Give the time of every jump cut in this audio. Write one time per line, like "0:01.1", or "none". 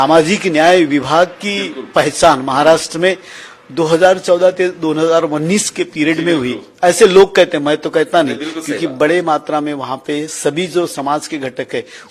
none